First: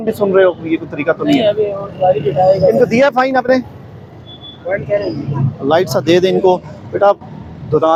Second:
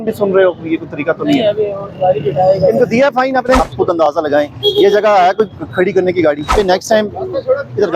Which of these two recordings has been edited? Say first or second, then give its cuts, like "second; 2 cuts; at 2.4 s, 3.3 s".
second; 2 cuts; at 3.7 s, 6.5 s